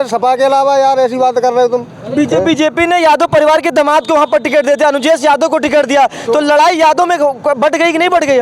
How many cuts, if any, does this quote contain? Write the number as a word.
zero